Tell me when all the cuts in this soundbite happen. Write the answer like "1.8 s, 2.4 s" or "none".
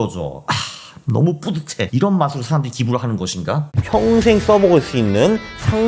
1.9 s, 3.7 s

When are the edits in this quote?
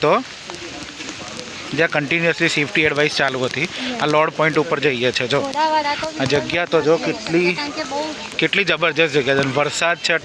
none

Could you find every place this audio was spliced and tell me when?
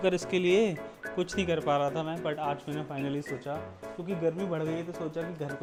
none

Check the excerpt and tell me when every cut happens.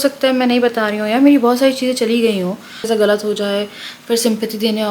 2.9 s

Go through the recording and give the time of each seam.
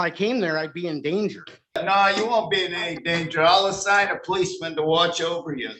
1.8 s

